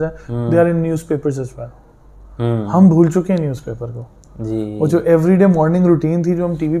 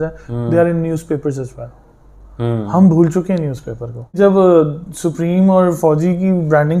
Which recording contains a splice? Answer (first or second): second